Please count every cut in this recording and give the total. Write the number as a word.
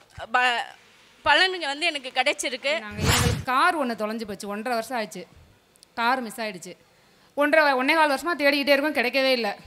one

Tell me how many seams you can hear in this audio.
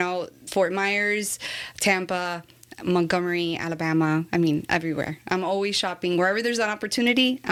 zero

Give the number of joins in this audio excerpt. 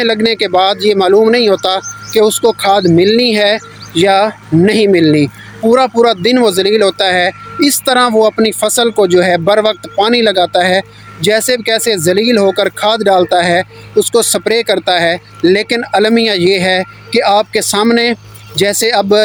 zero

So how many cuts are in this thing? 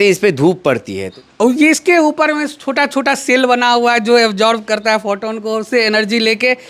one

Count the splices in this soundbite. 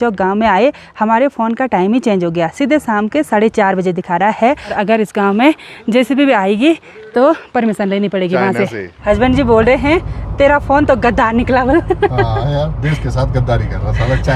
two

